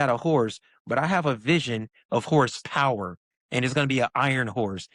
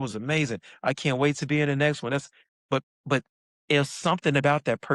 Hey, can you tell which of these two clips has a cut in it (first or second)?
second